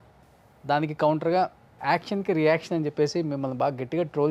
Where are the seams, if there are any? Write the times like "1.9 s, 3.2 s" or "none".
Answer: 1.8 s